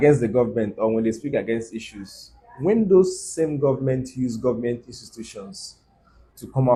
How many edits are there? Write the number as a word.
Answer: zero